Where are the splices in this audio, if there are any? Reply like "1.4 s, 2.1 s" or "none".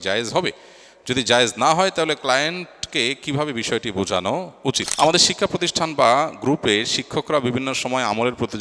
4.9 s